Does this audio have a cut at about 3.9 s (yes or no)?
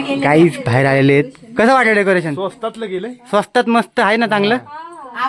no